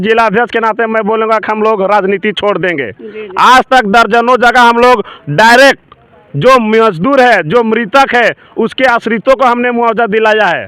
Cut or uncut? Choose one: uncut